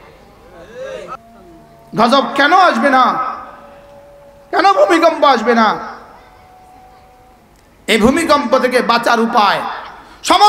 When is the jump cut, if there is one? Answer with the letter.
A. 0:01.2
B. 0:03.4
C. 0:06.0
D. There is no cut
A